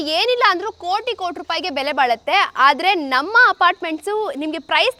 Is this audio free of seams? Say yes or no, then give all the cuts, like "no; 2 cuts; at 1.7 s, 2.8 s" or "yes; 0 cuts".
yes; 0 cuts